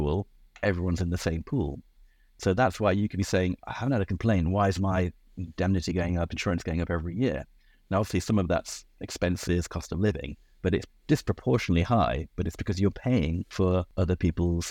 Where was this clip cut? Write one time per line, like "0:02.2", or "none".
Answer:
0:13.7